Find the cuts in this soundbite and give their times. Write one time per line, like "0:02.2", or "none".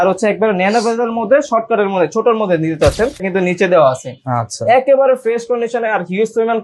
0:03.3